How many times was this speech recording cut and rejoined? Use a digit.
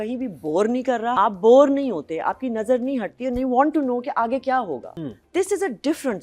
2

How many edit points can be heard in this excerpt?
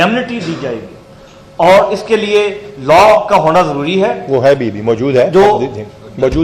0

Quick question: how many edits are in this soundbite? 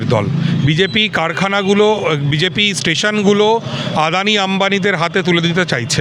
0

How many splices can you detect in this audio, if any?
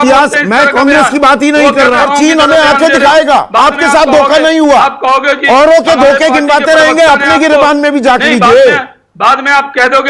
1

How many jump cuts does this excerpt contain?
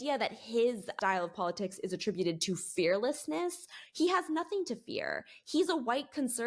1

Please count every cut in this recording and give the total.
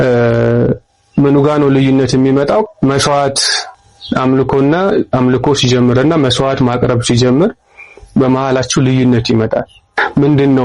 0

